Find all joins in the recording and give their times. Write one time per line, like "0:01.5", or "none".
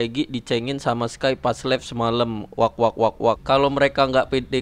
0:03.4